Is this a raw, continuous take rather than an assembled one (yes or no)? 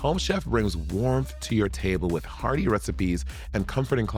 yes